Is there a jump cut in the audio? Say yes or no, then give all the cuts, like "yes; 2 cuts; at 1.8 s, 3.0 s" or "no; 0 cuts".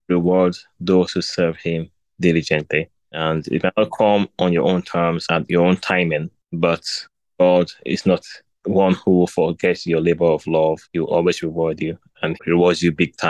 no; 0 cuts